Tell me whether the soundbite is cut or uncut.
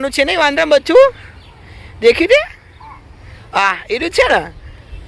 uncut